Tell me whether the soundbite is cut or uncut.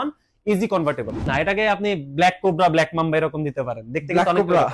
cut